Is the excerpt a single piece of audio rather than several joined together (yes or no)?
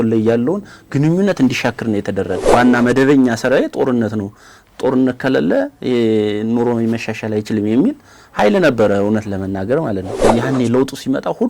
no